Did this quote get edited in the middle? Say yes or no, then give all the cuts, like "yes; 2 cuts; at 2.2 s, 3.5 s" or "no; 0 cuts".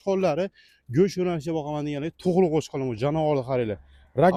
no; 0 cuts